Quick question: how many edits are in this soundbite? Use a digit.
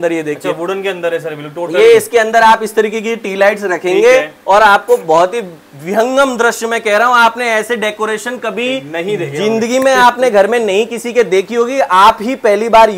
0